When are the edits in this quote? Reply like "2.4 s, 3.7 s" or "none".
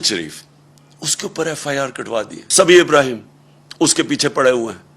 2.4 s